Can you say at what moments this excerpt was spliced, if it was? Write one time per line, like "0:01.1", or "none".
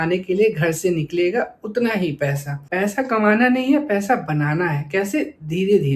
0:02.6